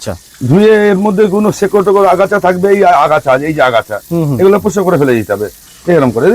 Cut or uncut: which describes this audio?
uncut